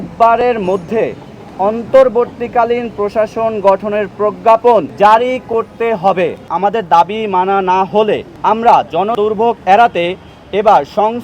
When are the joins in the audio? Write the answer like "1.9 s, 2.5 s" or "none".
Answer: 4.9 s, 6.5 s, 8.3 s, 9.1 s